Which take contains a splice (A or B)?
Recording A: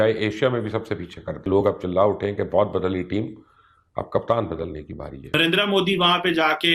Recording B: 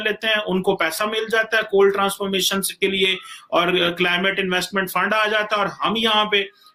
A